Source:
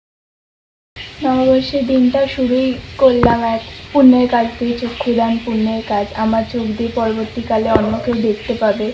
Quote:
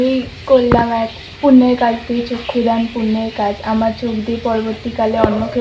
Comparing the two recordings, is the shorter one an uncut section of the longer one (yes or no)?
yes